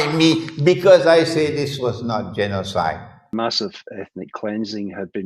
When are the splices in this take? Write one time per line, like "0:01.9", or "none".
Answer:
0:03.3